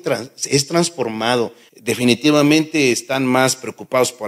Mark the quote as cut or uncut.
cut